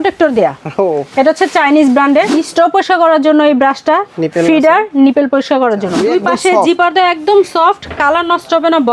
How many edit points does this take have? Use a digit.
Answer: 2